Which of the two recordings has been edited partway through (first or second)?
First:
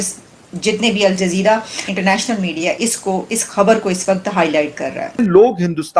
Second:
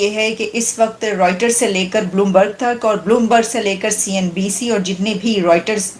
first